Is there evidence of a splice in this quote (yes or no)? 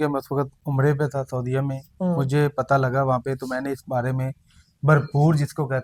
no